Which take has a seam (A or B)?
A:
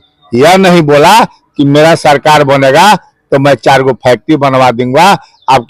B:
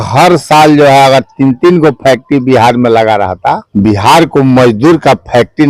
B